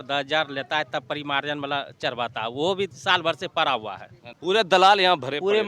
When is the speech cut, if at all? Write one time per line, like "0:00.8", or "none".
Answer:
0:04.2